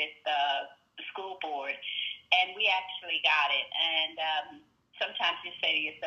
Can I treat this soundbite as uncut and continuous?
yes; 0 cuts

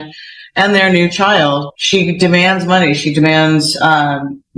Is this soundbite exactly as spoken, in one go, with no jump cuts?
no; 1 cut; at 1.7 s

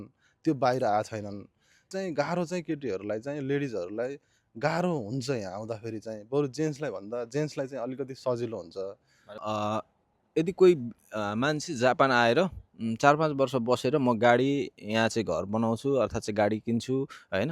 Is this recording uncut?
no; 2 cuts; at 1.9 s, 9.3 s

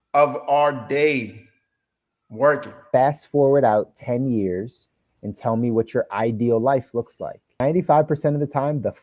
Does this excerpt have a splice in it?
yes; 2 cuts; at 2.7 s, 7.6 s

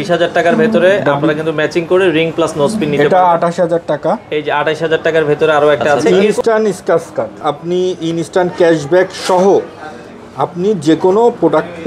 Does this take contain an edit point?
yes; 2 cuts; at 6.1 s, 7.3 s

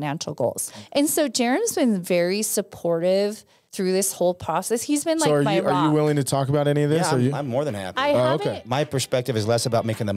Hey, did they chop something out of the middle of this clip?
no; 0 cuts

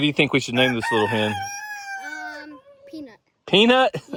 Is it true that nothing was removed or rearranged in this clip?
yes; 0 cuts

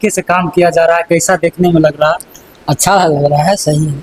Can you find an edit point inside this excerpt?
no; 0 cuts

